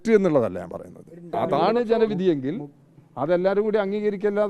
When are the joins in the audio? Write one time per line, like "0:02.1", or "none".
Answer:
0:01.4